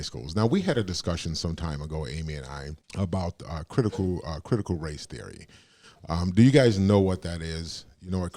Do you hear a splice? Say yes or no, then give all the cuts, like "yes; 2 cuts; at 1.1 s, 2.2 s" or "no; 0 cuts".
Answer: yes; 1 cut; at 2.8 s